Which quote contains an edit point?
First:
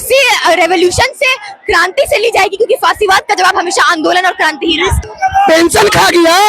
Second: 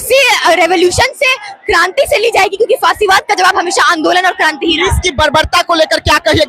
first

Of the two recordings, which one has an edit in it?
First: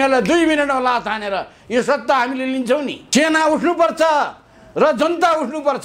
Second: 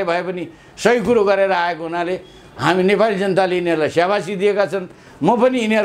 first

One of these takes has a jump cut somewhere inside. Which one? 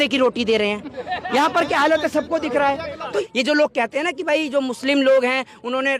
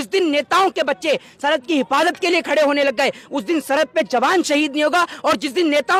first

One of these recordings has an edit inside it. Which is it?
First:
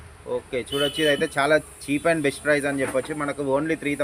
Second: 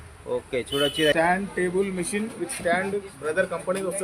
second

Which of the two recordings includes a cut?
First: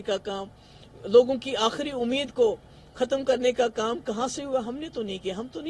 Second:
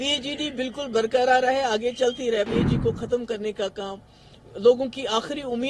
second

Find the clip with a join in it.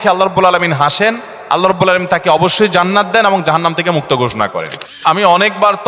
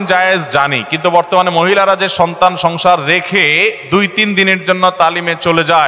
first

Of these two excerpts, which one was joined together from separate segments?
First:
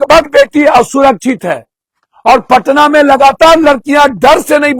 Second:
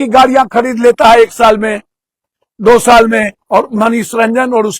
second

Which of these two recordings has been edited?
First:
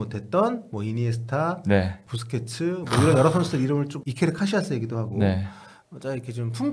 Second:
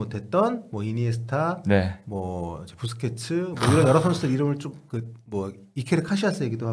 first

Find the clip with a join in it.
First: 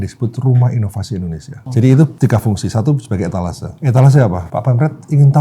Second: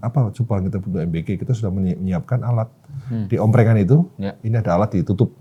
first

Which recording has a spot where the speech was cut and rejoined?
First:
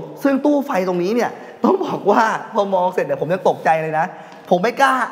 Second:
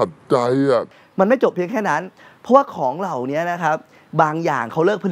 second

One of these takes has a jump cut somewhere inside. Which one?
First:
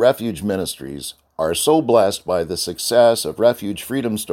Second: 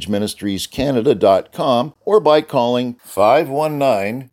second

